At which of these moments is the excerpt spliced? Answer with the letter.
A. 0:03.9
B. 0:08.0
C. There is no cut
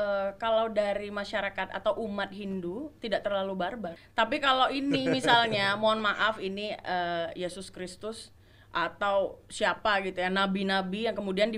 A